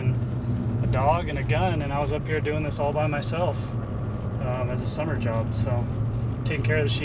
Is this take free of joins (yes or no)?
yes